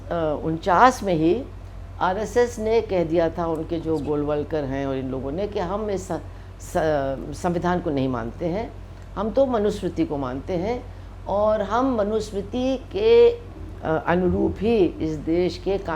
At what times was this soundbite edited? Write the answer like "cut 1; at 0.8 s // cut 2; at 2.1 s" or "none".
none